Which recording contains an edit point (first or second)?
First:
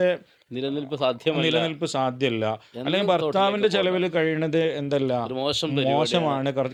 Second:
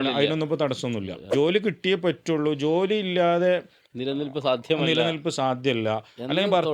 second